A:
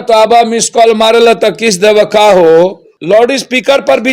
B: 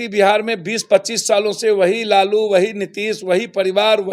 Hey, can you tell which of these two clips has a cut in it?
A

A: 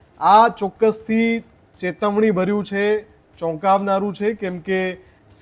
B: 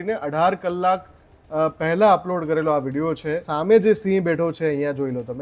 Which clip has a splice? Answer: B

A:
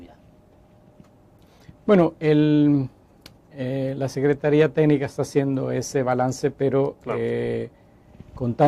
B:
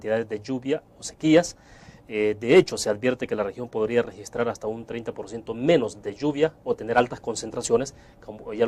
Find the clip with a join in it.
A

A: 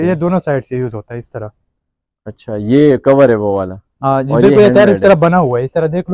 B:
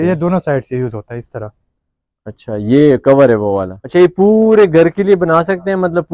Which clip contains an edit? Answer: B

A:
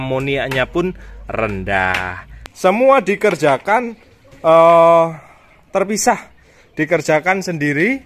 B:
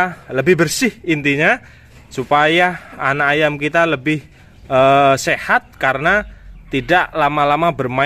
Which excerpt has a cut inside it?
A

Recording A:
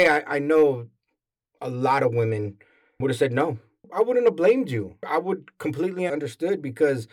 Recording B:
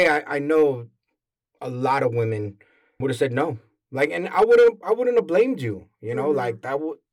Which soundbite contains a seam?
A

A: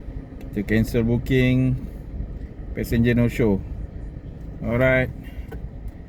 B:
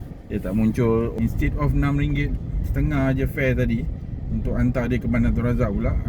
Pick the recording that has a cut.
B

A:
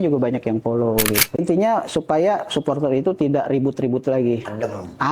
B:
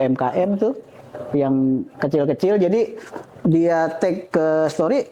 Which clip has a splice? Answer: A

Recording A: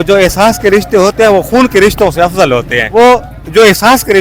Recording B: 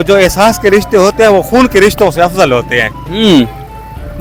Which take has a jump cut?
A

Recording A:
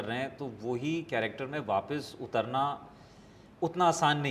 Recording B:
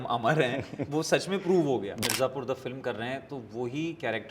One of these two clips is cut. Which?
B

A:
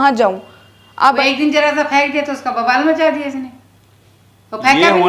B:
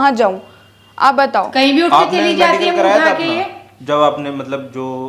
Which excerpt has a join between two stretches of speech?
A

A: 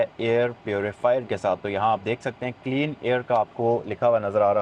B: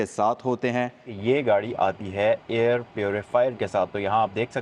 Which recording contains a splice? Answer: B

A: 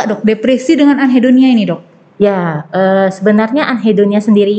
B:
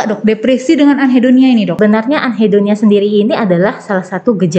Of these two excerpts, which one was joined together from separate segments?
B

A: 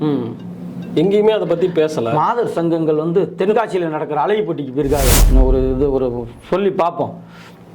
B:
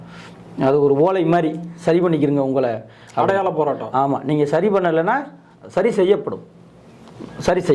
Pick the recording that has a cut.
A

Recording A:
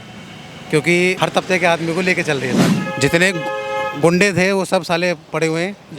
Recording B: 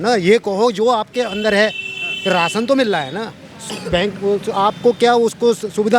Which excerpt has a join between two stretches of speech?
A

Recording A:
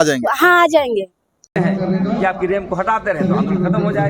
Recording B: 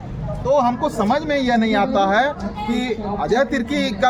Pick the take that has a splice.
A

